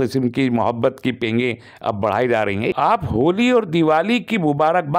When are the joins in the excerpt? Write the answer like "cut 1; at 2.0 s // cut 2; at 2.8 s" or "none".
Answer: cut 1; at 2.7 s